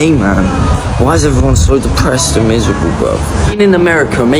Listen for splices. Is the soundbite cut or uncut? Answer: cut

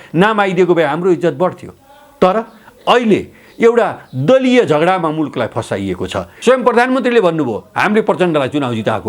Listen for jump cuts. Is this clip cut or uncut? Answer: cut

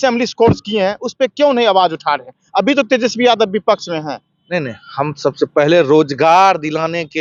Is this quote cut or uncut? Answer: uncut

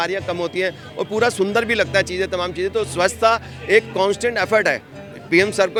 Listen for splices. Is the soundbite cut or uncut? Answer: uncut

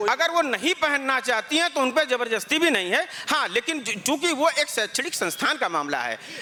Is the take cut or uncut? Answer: uncut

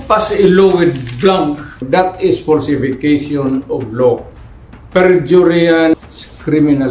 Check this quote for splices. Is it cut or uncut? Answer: cut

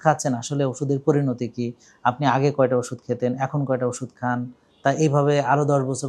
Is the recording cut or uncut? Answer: uncut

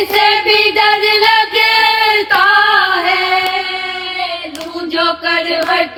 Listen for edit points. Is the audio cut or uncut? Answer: uncut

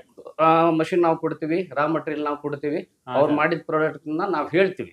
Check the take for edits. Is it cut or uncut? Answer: uncut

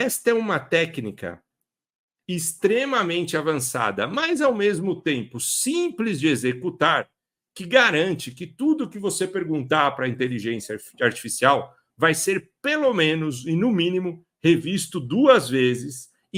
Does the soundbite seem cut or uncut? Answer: uncut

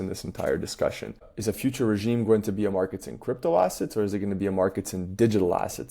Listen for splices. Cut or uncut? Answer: cut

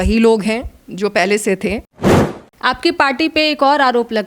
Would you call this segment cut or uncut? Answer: cut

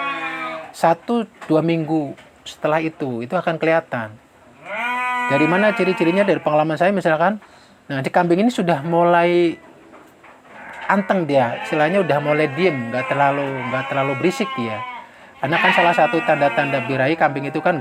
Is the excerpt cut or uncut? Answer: uncut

